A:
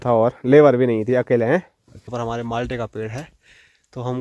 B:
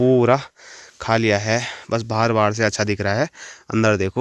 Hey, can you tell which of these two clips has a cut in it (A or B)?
A